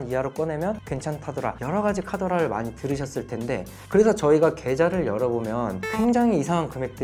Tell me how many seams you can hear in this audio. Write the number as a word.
zero